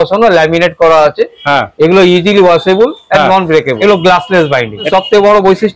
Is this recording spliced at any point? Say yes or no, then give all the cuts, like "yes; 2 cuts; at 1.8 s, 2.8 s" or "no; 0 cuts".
yes; 2 cuts; at 3.7 s, 4.9 s